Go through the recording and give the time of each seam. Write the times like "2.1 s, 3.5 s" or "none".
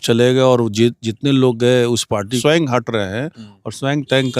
2.4 s